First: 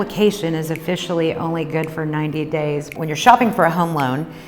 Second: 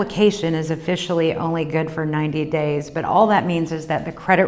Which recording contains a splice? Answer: first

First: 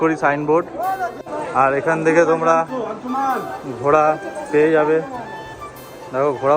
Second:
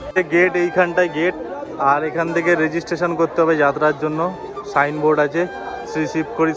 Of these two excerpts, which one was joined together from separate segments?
first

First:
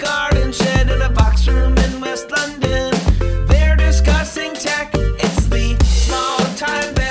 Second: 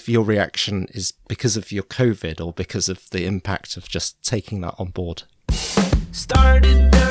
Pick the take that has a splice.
second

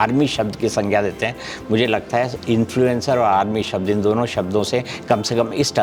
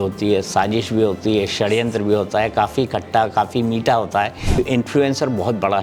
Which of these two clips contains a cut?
second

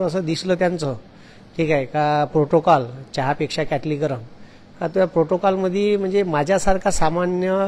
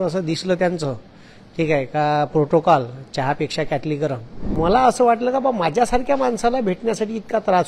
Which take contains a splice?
second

